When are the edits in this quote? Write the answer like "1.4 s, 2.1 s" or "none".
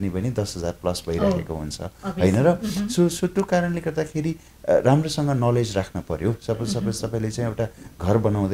none